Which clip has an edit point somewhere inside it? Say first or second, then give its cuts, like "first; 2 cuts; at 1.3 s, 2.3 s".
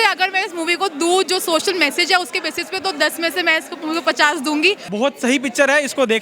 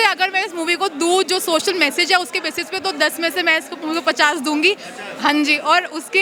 first; 1 cut; at 4.9 s